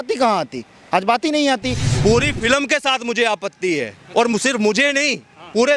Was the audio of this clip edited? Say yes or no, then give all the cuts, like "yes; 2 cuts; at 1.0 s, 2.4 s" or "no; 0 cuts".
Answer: yes; 1 cut; at 1.9 s